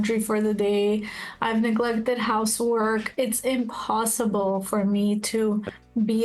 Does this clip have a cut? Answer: no; 0 cuts

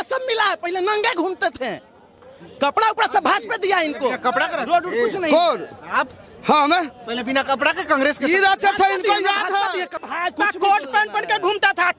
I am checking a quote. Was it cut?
yes; 1 cut; at 10.0 s

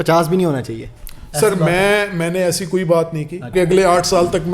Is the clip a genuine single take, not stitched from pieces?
no; 1 cut; at 3.5 s

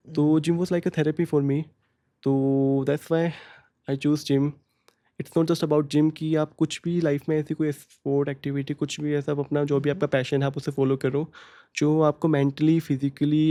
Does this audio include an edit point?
no; 0 cuts

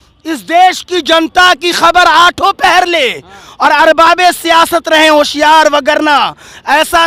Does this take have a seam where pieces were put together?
no; 0 cuts

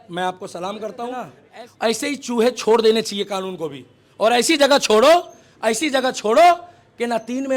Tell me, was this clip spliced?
yes; 1 cut; at 1.4 s

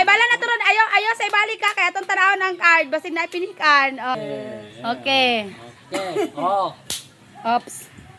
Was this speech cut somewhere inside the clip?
yes; 1 cut; at 4.2 s

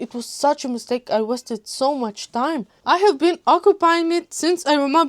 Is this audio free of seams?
no; 1 cut; at 2.7 s

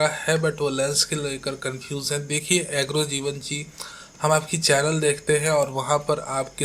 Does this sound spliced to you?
no; 0 cuts

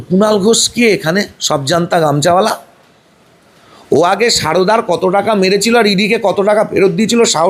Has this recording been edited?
no; 0 cuts

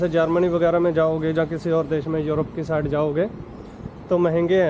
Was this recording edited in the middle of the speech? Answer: no; 0 cuts

